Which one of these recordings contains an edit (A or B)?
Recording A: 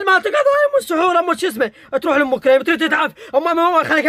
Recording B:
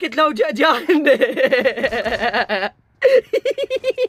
A